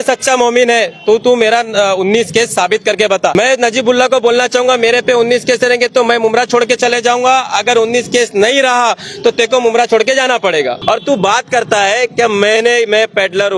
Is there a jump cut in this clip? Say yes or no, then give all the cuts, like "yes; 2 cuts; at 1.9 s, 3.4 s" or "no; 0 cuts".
yes; 2 cuts; at 3.3 s, 10.8 s